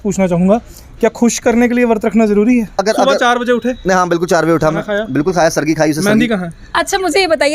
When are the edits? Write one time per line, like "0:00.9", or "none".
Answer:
0:02.8
0:06.7